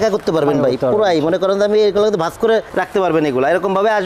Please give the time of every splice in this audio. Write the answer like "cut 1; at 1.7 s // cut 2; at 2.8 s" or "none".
none